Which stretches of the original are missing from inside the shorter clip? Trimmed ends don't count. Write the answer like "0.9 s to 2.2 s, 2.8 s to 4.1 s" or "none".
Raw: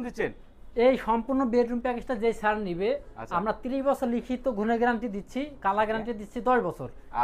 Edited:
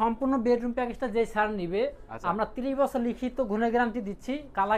none